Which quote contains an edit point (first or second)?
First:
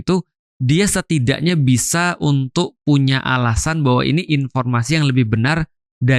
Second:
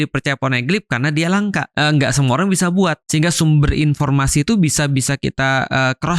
second